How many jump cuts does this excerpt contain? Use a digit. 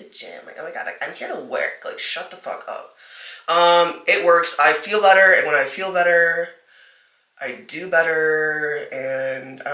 0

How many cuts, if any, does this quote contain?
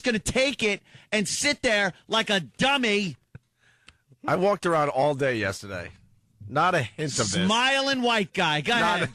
0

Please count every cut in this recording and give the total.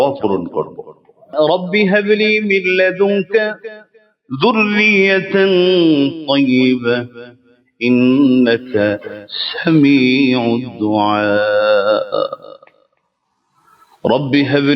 1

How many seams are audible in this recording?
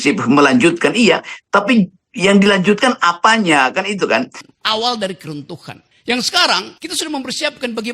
1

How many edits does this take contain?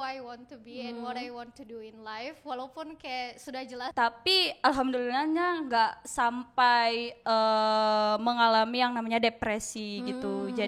1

